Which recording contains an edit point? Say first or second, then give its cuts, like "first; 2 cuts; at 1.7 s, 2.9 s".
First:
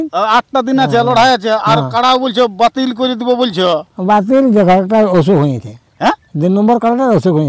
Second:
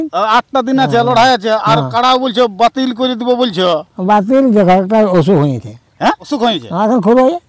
second; 1 cut; at 6.2 s